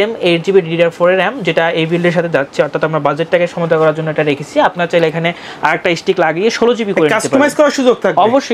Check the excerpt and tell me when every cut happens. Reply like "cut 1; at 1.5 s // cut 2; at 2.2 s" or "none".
none